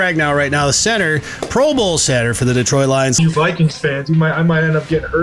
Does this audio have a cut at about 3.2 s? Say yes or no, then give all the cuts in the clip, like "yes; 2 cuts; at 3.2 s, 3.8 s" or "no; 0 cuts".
yes; 1 cut; at 3.2 s